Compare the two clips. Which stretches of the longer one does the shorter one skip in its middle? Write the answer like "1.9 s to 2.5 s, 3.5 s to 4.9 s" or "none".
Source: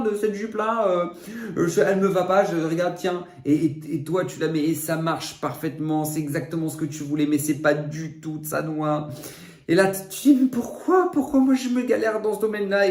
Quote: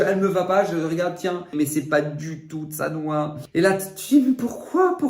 3.4 s to 7.3 s, 9.1 s to 9.5 s